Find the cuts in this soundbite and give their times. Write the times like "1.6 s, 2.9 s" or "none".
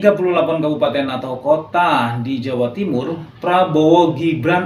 none

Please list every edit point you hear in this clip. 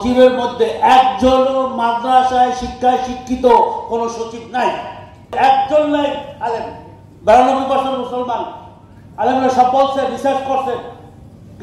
5.3 s

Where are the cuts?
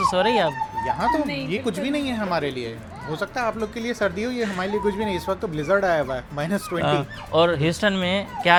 none

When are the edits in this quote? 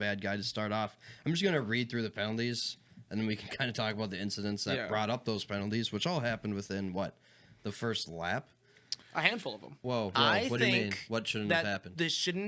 9.8 s

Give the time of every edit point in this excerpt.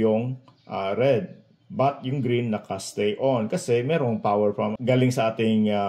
4.8 s

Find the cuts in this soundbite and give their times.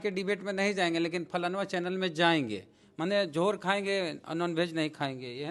none

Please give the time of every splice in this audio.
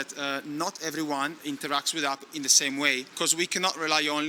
1.4 s, 3.1 s

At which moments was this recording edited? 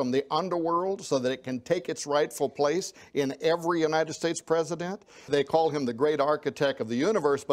5.3 s

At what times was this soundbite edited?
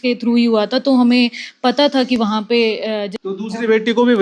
3.1 s

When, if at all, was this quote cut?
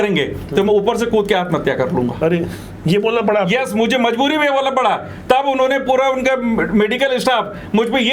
none

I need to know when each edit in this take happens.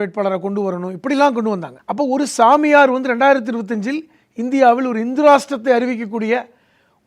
1.8 s

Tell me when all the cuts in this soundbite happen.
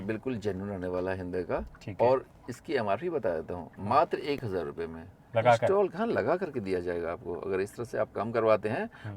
none

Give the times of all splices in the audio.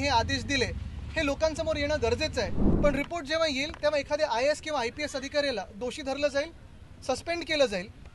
2.6 s

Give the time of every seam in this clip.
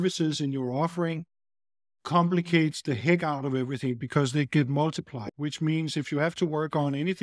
1.9 s, 5.1 s

